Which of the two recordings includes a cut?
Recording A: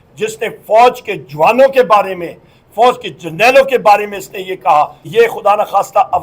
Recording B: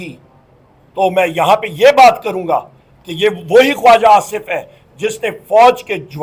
A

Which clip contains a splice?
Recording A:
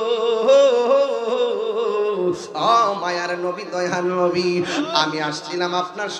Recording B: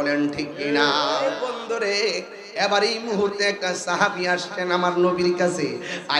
B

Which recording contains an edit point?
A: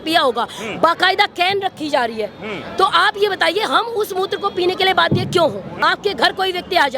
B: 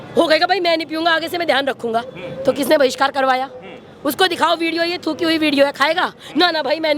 A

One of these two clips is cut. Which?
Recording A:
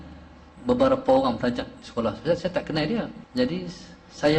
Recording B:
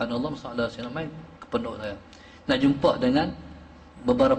A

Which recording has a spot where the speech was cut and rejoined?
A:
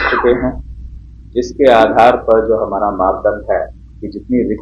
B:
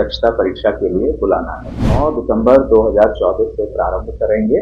B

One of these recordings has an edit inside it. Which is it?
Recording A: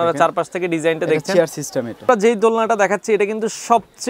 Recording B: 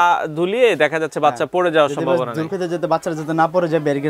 A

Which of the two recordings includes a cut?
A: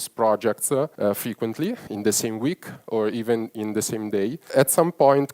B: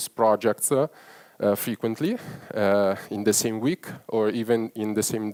A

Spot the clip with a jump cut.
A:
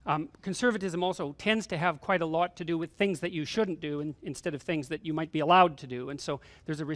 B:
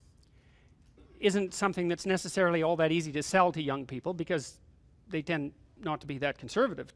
A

